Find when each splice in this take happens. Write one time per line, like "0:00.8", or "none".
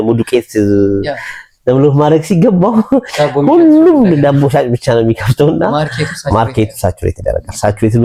none